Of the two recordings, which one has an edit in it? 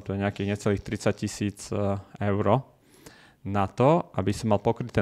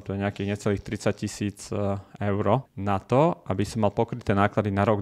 second; 1 cut; at 2.7 s

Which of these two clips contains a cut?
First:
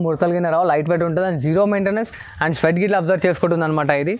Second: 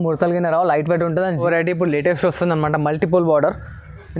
second; 1 cut; at 1.4 s

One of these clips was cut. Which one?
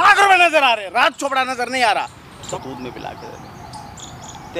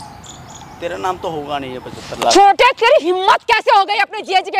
first; 1 cut; at 2.5 s

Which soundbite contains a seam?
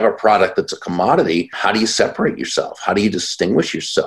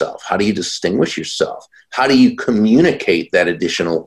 first; 1 cut; at 1.5 s

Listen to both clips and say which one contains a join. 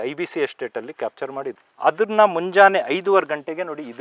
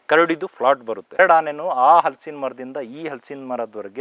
second; 1 cut; at 1.2 s

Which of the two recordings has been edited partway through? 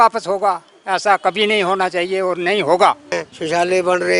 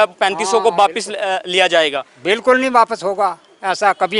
first; 1 cut; at 3.1 s

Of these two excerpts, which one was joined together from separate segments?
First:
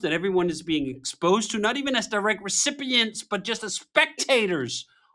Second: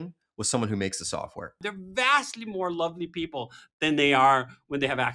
second; 1 cut; at 1.7 s

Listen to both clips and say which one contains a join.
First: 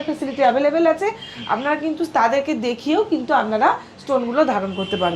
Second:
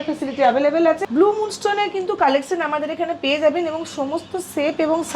second; 1 cut; at 1.0 s

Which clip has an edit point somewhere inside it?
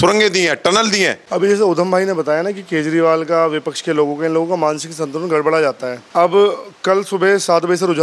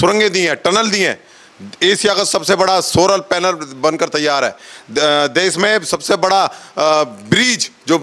first; 2 cuts; at 1.2 s, 5.9 s

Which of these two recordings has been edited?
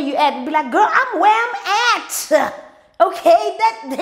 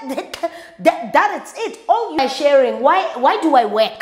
second; 1 cut; at 2.2 s

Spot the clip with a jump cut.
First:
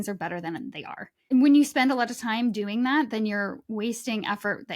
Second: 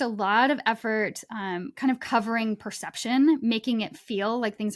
first; 1 cut; at 1.3 s

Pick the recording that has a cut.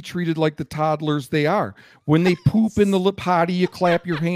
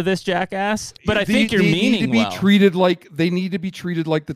second; 1 cut; at 0.9 s

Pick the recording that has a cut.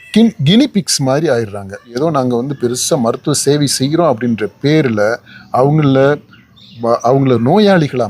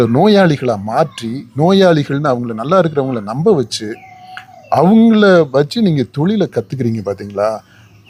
first; 1 cut; at 2.0 s

